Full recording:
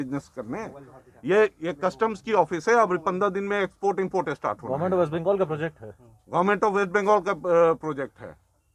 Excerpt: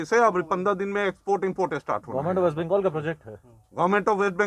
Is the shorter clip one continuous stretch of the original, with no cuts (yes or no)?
yes